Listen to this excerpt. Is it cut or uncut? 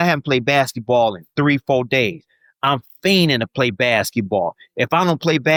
uncut